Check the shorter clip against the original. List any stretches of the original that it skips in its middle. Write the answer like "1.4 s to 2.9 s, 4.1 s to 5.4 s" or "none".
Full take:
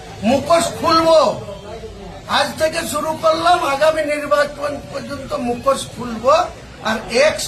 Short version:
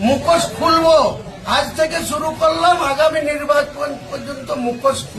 1.5 s to 2.1 s